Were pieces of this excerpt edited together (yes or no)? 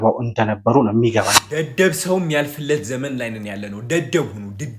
yes